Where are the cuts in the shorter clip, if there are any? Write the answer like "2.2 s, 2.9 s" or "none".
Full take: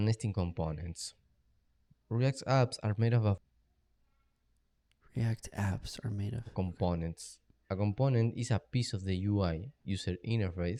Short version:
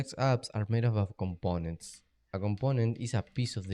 1.1 s